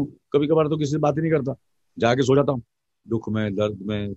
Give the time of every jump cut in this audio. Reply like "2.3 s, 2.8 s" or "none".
2.9 s